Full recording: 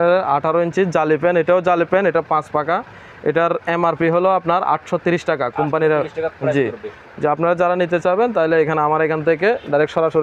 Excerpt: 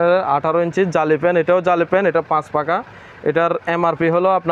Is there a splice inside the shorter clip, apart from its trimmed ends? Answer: no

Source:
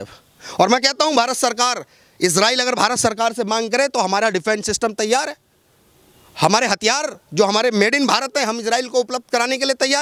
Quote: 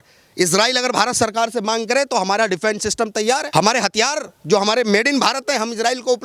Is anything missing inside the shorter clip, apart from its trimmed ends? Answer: yes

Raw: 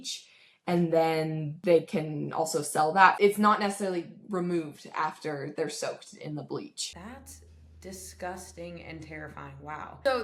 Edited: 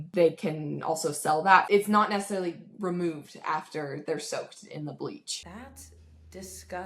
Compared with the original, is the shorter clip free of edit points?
yes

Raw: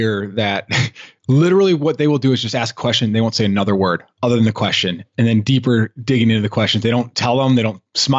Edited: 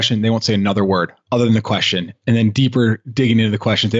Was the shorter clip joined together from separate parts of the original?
no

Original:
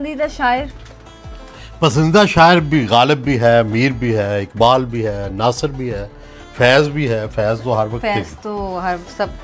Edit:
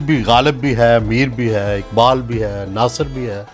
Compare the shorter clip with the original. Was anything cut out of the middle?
no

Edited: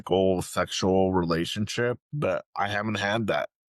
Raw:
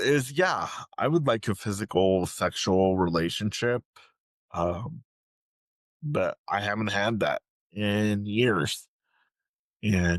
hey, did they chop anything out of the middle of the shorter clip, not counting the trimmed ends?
yes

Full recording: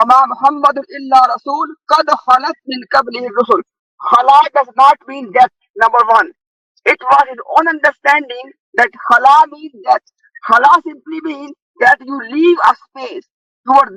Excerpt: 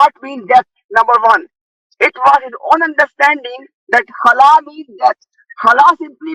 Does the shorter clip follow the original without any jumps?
yes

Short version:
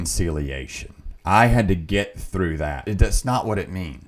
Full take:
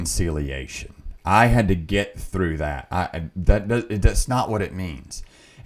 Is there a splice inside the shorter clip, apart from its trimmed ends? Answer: yes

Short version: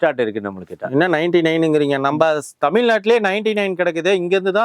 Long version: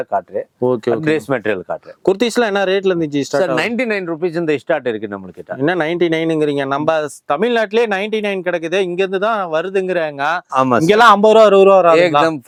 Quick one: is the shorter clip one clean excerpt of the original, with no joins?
yes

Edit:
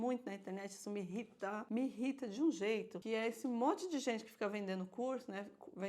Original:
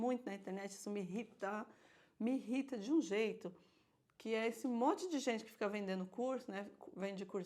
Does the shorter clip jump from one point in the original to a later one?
yes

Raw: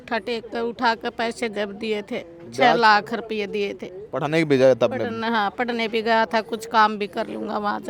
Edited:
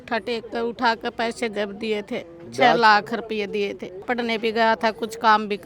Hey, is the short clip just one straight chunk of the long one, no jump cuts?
no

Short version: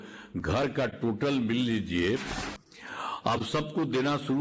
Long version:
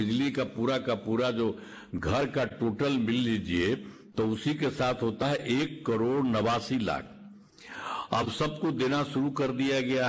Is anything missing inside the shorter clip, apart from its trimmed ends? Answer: yes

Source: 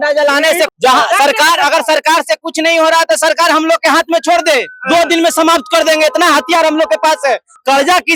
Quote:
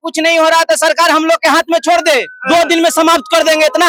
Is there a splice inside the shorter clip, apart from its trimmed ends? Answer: no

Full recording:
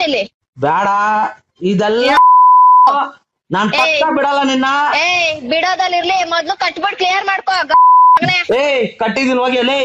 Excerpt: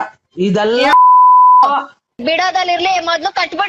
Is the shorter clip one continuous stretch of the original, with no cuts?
no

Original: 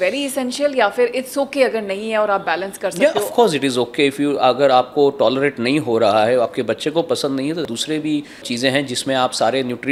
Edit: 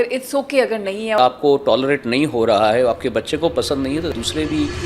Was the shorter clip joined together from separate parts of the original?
yes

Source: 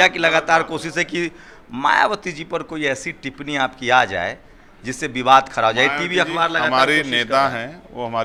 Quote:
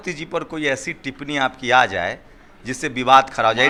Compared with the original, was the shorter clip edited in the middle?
no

